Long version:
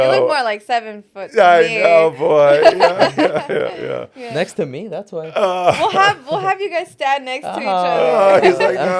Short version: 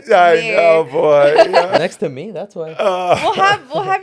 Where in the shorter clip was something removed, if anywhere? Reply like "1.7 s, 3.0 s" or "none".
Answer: 1.8 s